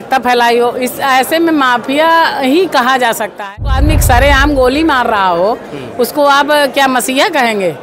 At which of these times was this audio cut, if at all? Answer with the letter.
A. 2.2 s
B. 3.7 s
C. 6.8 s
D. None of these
B